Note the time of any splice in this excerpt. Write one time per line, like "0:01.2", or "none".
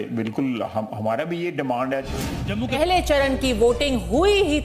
0:02.8